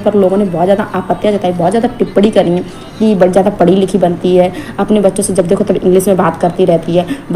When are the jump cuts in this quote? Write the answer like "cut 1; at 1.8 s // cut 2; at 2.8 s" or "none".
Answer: none